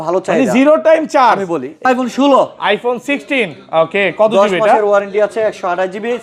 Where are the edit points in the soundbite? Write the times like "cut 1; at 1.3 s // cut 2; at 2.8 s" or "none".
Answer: cut 1; at 1.8 s